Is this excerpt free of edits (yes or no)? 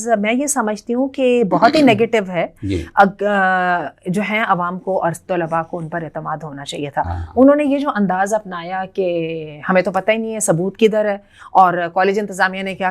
yes